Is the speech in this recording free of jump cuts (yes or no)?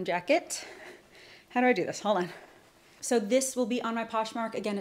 yes